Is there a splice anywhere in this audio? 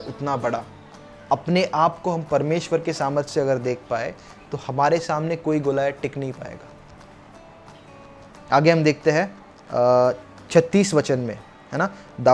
no; 0 cuts

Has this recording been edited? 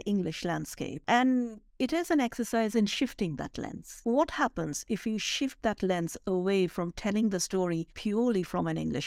yes; 3 cuts; at 1.0 s, 3.9 s, 7.9 s

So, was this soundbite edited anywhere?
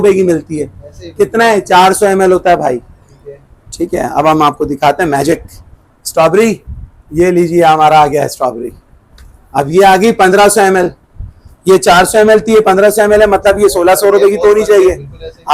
no; 0 cuts

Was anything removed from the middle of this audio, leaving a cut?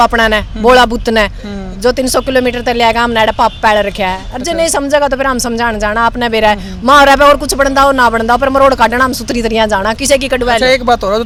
no; 0 cuts

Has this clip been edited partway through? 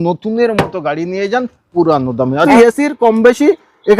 yes; 1 cut; at 2.5 s

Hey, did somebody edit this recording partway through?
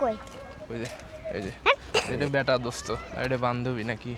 yes; 2 cuts; at 2.1 s, 3.1 s

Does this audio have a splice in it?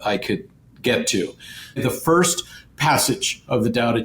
yes; 1 cut; at 1.8 s

